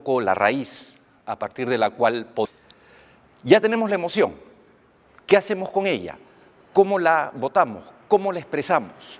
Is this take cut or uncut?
uncut